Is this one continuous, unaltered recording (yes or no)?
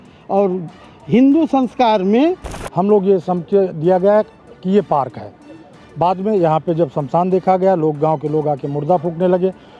no